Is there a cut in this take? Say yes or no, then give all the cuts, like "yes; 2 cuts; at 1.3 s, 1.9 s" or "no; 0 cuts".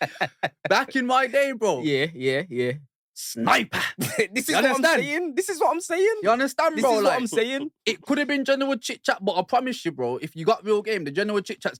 no; 0 cuts